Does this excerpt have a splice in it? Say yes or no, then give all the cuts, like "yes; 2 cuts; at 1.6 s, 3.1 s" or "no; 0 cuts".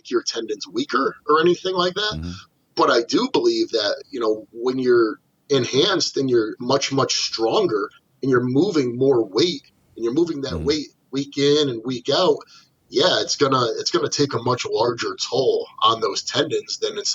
no; 0 cuts